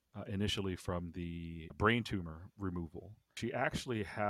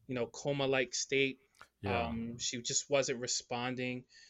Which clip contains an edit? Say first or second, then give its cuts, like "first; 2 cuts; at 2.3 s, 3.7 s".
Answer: first; 2 cuts; at 1.7 s, 3.3 s